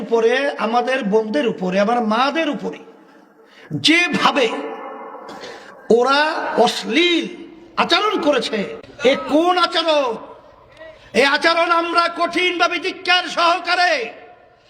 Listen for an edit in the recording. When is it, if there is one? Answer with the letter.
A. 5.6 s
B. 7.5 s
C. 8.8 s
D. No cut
C